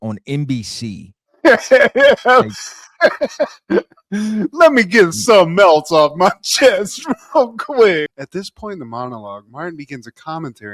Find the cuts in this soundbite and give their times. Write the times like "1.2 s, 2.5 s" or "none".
8.2 s